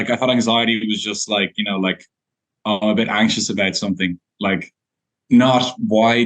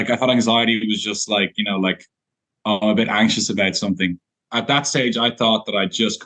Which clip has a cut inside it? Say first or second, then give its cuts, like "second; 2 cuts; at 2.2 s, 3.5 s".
second; 1 cut; at 4.3 s